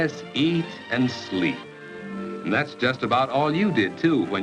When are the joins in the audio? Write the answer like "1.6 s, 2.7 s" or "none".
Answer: 1.3 s